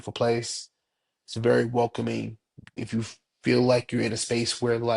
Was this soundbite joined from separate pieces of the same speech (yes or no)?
yes